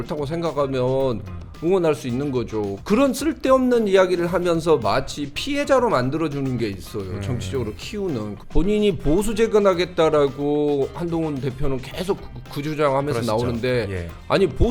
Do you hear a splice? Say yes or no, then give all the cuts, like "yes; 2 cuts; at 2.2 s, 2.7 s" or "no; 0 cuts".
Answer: yes; 2 cuts; at 2.7 s, 8.3 s